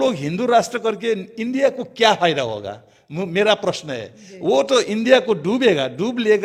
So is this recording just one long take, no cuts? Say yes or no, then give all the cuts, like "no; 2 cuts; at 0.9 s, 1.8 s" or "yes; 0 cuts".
yes; 0 cuts